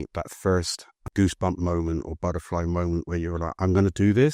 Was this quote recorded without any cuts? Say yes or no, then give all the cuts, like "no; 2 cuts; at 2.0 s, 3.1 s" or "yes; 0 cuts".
yes; 0 cuts